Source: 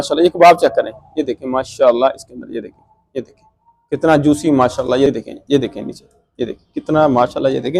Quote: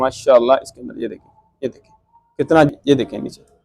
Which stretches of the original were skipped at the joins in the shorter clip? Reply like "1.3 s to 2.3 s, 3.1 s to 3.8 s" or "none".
4.2 s to 5.3 s